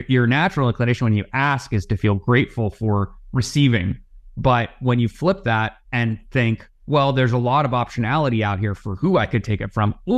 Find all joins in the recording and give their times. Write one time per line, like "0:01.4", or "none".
0:05.8
0:06.7